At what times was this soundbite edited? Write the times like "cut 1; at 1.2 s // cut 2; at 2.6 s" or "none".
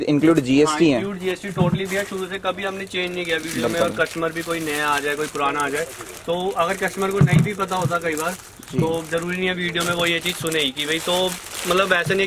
none